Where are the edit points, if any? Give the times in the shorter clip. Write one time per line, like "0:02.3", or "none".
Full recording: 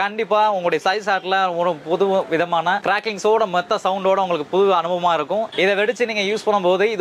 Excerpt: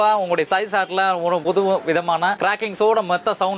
0:01.4